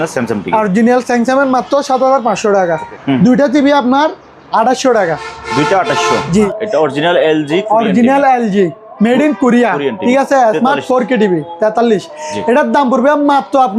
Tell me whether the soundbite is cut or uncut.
cut